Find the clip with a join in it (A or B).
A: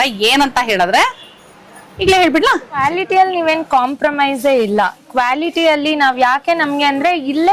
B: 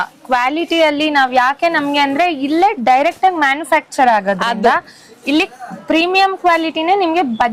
A